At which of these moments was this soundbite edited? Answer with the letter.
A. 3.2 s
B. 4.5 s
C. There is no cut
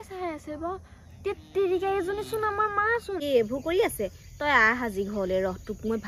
A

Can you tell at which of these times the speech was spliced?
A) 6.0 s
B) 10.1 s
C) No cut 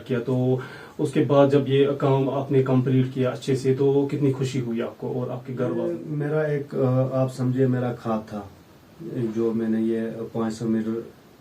A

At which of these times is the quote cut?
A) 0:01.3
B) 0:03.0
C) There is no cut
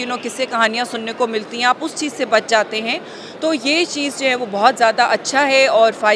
C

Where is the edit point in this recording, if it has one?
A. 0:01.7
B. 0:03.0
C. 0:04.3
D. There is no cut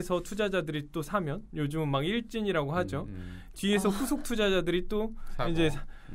D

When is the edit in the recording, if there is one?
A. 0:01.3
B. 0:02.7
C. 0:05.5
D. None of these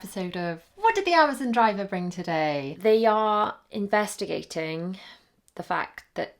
B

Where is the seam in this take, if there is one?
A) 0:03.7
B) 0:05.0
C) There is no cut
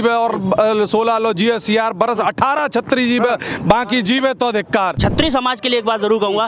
B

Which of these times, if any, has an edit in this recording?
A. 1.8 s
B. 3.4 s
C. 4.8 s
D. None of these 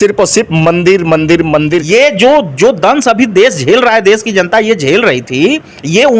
A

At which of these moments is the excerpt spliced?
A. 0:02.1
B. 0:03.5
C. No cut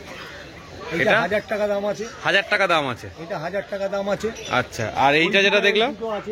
C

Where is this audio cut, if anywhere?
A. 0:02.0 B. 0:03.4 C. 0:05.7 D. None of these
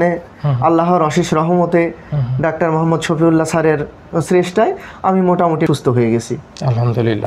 C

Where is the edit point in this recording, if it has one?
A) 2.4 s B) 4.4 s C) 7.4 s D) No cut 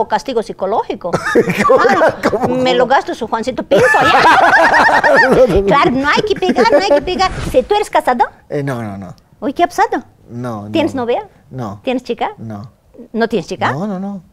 C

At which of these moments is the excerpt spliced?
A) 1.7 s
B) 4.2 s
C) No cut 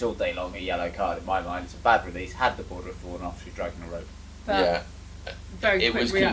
C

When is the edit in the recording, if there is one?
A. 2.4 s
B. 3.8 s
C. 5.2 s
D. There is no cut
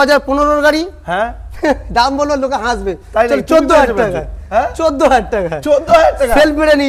D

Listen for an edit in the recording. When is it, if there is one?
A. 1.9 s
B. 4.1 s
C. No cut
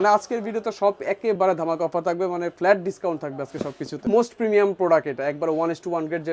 B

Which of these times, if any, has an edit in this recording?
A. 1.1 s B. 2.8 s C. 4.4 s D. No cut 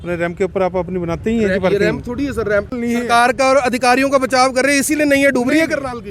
B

